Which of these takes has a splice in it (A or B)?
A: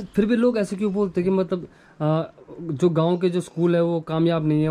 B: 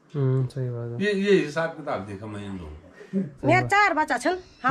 B